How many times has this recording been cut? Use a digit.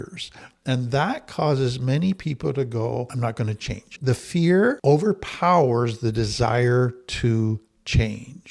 2